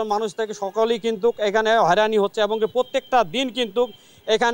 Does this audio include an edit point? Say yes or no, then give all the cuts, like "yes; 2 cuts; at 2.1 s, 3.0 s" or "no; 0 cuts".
no; 0 cuts